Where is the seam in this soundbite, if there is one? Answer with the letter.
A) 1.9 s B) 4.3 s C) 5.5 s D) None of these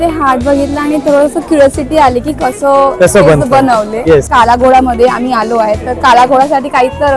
B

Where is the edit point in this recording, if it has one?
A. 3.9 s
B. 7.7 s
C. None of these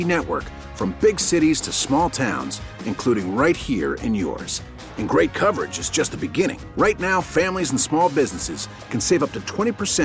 C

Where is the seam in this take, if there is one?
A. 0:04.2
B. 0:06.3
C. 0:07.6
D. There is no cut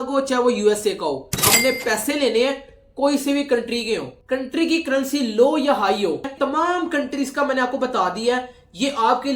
B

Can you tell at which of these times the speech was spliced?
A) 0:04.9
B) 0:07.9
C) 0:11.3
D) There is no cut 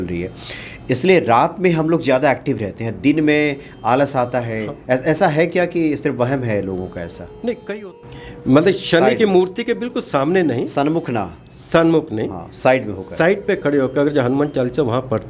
B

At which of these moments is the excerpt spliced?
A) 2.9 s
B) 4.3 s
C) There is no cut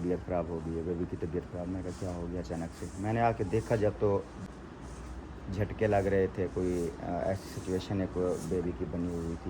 B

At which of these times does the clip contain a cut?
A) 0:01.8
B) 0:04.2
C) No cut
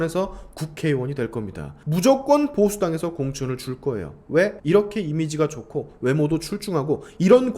A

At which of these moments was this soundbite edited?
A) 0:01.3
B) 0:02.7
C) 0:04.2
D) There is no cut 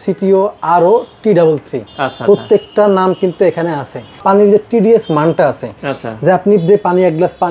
C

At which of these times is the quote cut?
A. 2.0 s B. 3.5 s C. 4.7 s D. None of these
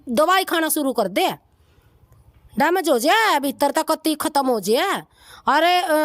D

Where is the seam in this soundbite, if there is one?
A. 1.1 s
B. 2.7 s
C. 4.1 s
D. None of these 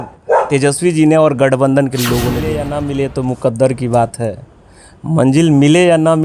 B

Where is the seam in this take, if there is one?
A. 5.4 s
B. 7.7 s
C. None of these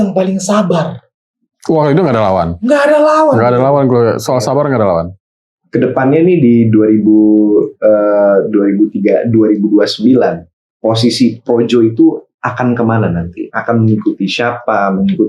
A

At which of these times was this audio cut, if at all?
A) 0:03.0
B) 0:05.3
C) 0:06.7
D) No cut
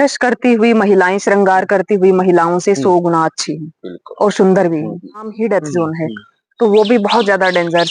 B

